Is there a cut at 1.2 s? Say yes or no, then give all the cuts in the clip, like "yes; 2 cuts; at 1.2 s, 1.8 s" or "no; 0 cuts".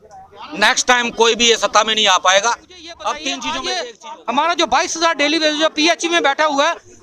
no; 1 cut; at 3.5 s